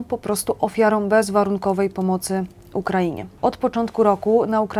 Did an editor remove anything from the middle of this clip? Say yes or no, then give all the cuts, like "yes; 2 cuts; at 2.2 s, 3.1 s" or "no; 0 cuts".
yes; 1 cut; at 3.3 s